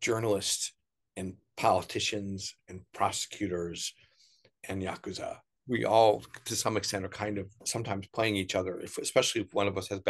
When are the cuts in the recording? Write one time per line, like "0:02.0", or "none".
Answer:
0:05.5
0:07.6

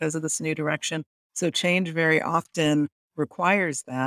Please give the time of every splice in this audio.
0:01.1

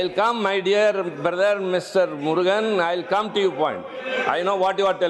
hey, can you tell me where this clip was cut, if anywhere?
none

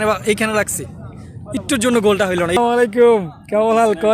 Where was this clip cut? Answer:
0:02.6

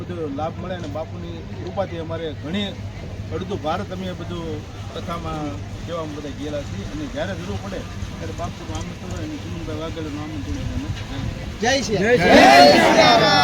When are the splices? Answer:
none

